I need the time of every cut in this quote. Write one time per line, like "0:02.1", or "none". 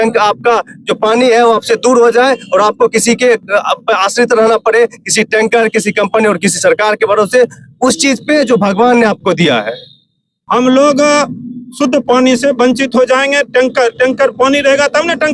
0:10.3